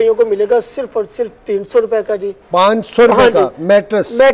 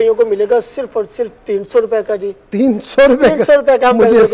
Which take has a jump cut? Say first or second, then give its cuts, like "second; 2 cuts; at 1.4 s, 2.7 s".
first; 1 cut; at 2.4 s